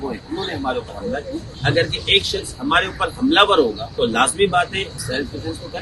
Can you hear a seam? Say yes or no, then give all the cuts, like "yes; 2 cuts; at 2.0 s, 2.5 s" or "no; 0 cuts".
yes; 3 cuts; at 1.5 s, 3.9 s, 5.0 s